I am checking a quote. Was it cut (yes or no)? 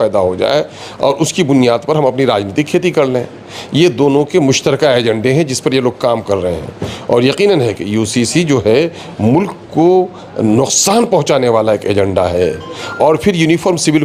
no